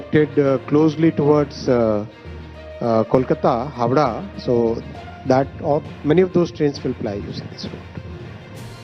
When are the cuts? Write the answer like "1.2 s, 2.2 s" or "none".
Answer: 7.9 s